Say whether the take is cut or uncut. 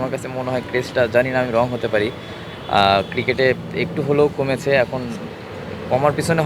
uncut